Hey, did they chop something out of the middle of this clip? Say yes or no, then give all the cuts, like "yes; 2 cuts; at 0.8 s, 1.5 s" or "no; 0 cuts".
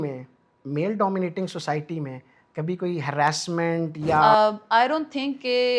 yes; 1 cut; at 4.2 s